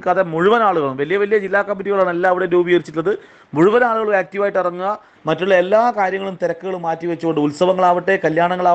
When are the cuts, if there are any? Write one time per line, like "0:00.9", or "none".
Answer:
0:05.1